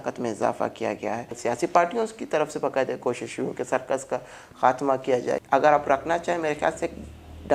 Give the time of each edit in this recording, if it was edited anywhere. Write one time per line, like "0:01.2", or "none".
0:01.3
0:05.4